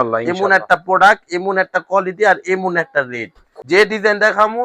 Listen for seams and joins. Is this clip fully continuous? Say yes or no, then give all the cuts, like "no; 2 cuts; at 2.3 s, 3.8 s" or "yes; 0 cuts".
no; 1 cut; at 3.5 s